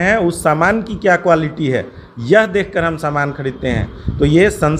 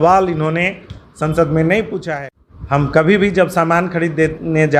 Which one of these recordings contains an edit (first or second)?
second